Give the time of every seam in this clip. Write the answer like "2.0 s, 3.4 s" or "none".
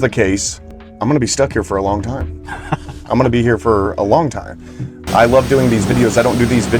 4.9 s